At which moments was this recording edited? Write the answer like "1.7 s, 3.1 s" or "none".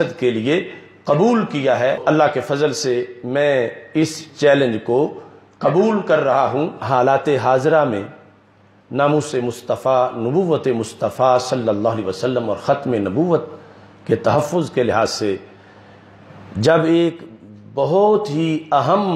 2.0 s, 6.8 s